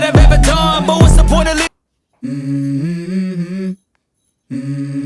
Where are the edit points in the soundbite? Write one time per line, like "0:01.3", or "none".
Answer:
0:01.7

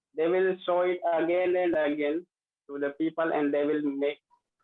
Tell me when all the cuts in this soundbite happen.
none

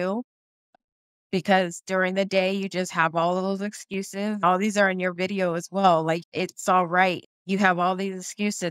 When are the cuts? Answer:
0:04.4
0:06.2
0:07.2

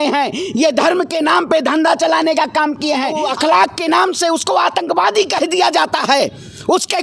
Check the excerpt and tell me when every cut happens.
0:03.2

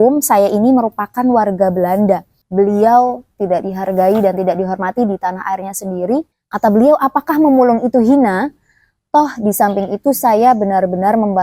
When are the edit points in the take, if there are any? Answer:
0:02.4
0:06.3

